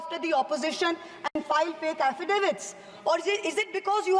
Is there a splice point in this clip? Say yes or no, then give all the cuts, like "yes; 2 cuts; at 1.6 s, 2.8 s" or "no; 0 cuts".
no; 0 cuts